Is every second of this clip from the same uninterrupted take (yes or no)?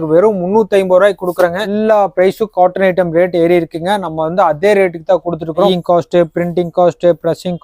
no